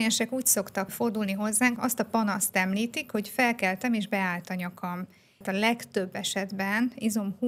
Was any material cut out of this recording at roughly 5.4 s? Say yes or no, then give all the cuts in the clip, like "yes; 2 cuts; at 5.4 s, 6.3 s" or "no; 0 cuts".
yes; 3 cuts; at 0.9 s, 1.8 s, 5.4 s